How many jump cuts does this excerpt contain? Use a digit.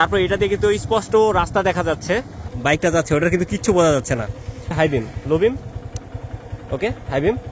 2